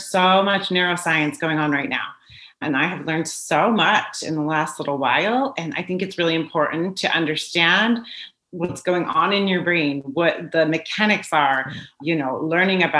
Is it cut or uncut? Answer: uncut